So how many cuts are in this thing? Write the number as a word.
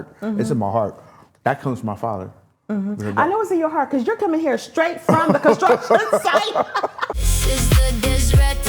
one